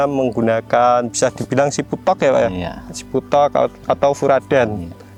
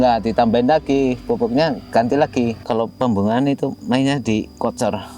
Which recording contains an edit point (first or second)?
second